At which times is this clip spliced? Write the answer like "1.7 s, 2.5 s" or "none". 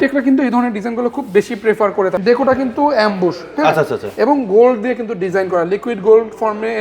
2.2 s